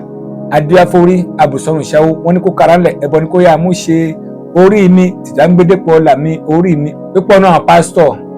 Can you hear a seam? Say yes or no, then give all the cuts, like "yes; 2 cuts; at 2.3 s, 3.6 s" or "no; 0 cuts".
yes; 1 cut; at 6.9 s